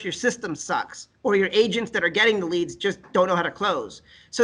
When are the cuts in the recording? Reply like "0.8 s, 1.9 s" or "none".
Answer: none